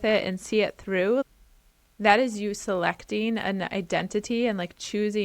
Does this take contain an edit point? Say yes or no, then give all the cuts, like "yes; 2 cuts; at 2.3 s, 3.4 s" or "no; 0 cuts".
yes; 1 cut; at 1.2 s